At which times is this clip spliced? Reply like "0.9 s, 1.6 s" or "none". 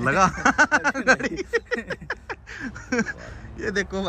none